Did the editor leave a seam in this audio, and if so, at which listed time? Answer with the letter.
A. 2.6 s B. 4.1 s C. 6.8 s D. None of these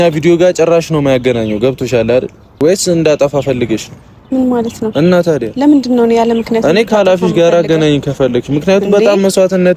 A